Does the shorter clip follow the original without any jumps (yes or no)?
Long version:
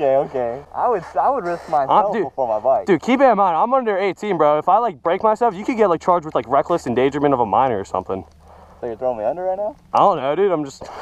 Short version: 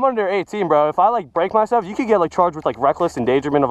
yes